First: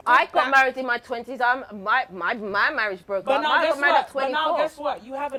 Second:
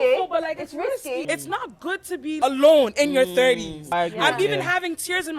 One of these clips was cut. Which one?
second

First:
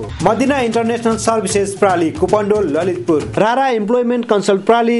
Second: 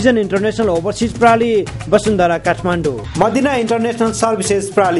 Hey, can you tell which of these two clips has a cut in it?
first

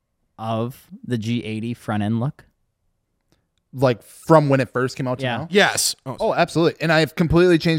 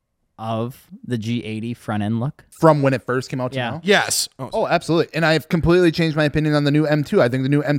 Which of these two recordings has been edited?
second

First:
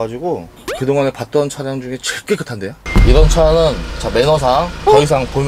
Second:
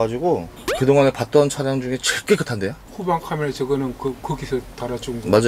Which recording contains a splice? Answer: first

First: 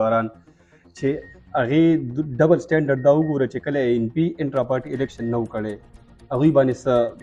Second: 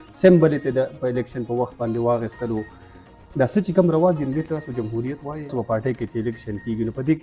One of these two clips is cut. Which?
second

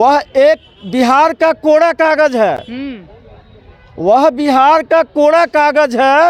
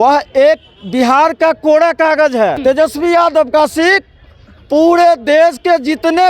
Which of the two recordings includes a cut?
second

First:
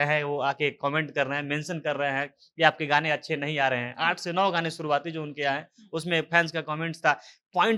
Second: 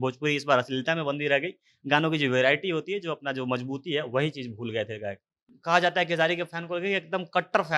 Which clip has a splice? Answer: second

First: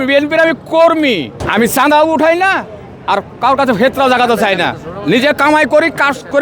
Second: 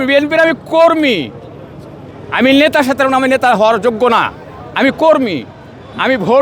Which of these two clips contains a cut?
first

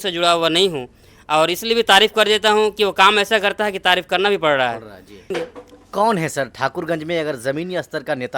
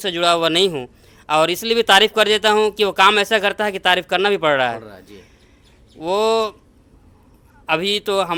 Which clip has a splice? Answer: first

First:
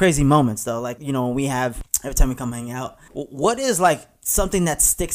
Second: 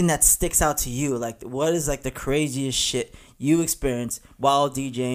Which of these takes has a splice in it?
first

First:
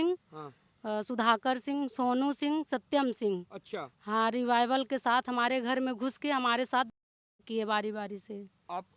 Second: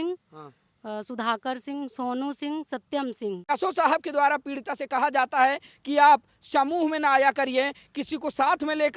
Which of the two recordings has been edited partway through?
second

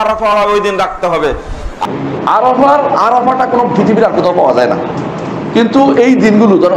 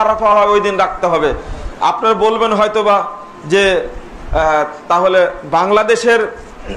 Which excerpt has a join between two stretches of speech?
first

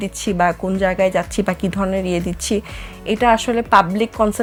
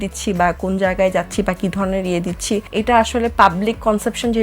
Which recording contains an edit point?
second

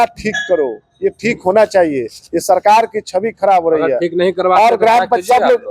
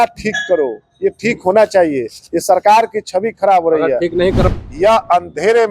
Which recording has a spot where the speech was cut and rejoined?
second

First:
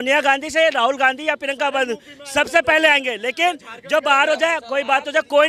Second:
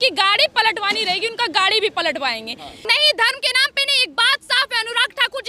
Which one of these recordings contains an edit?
second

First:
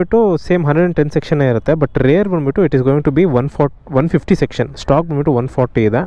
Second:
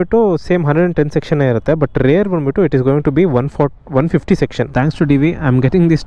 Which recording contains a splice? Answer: second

